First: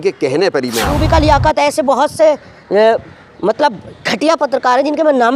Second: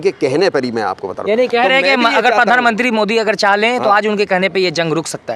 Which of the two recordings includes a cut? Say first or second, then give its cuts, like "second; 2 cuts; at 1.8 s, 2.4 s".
first; 1 cut; at 1.0 s